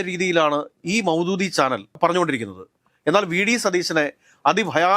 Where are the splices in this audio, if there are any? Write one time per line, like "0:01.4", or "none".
0:01.9